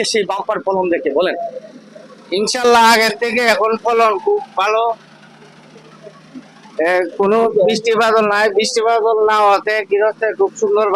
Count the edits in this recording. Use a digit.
0